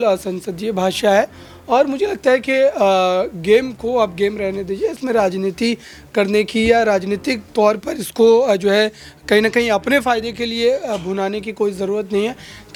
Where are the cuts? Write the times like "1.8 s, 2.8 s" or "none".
none